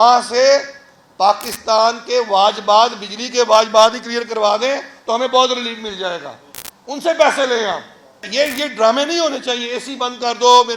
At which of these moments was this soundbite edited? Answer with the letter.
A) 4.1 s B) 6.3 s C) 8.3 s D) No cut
C